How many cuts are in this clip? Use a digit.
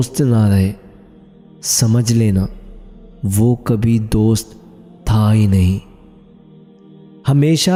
0